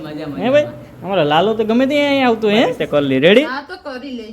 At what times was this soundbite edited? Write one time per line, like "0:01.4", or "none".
0:02.8